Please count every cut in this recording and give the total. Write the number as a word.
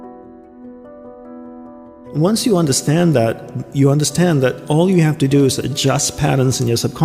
one